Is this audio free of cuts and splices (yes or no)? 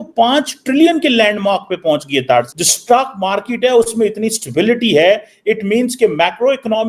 no